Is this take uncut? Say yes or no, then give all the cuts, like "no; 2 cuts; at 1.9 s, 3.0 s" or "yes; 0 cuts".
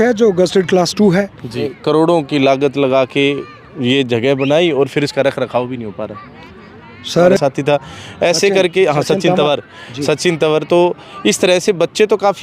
no; 2 cuts; at 1.7 s, 7.4 s